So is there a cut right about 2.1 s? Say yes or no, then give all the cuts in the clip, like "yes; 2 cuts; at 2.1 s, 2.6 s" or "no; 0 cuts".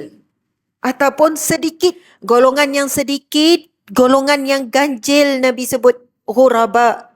yes; 1 cut; at 2.1 s